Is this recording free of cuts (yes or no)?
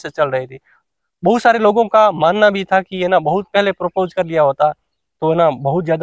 yes